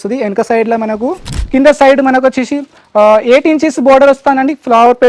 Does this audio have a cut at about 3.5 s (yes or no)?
no